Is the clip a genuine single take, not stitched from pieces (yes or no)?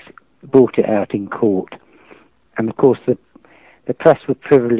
no